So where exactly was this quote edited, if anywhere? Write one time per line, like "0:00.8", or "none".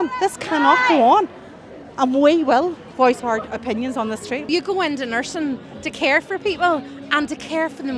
0:04.4